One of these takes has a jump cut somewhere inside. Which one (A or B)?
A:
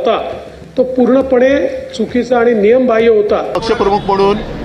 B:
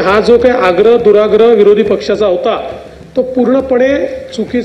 A